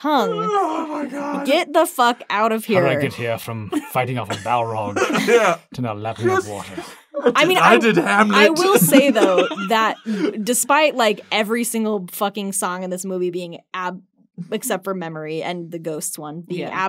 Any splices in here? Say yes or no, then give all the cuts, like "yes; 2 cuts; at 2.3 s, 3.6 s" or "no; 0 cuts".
no; 0 cuts